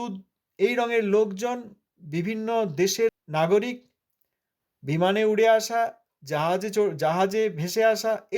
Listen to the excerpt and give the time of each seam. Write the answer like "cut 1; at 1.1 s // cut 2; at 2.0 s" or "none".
cut 1; at 3.2 s